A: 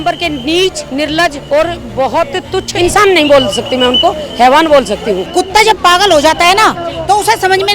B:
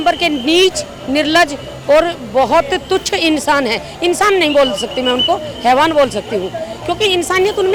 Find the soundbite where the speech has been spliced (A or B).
A